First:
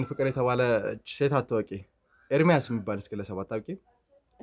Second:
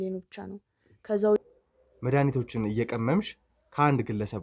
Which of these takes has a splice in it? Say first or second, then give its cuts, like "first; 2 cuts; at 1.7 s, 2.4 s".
second; 1 cut; at 1.5 s